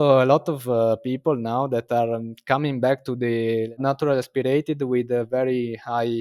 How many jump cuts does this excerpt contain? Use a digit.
1